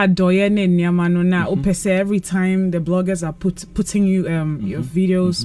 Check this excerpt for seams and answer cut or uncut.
uncut